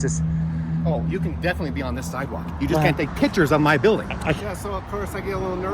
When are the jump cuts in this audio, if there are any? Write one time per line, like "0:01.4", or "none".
0:04.4